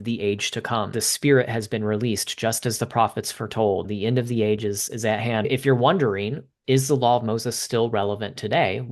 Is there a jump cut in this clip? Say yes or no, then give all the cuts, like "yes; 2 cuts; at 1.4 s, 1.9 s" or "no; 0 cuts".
yes; 4 cuts; at 1.0 s, 3.9 s, 5.5 s, 6.5 s